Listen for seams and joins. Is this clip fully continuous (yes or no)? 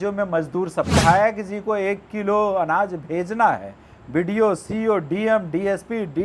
no